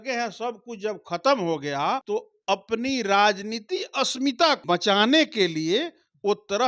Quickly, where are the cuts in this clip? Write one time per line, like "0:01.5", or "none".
0:02.0
0:04.6